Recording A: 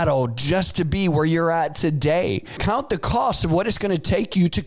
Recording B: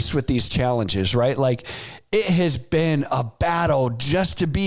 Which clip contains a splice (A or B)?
A